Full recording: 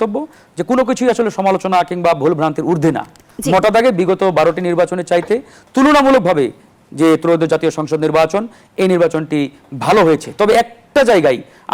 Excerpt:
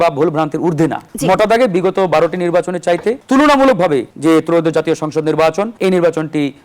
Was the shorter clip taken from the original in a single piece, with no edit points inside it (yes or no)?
no